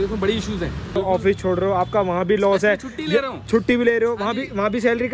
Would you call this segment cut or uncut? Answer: cut